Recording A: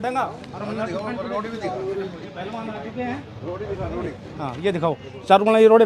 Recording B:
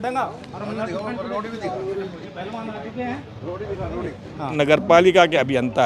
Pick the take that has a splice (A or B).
B